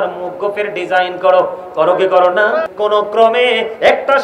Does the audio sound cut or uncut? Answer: cut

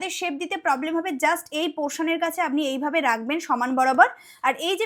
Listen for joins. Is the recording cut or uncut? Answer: uncut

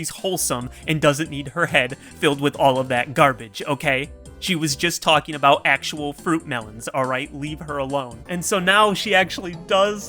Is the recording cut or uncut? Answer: cut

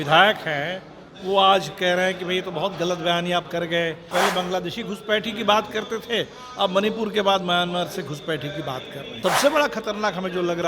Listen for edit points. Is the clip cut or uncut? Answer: cut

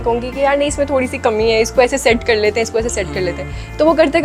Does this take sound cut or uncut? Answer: uncut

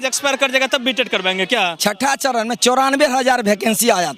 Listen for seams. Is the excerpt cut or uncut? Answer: cut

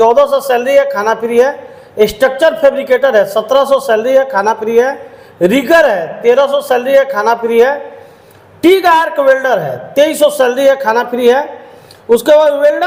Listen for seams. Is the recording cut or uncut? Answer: uncut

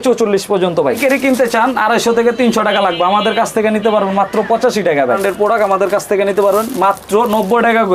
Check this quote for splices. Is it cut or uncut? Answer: cut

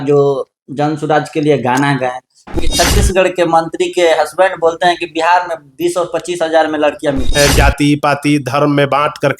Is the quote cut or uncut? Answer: cut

